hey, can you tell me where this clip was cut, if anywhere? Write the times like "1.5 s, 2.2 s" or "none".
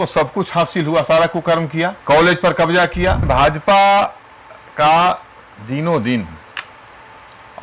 2.0 s, 3.2 s